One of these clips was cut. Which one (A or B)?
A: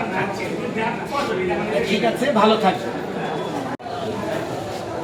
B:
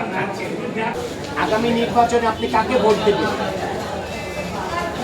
B